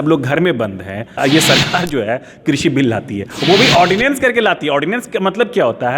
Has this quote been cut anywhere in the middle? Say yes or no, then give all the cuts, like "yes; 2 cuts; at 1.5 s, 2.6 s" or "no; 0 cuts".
yes; 1 cut; at 1.2 s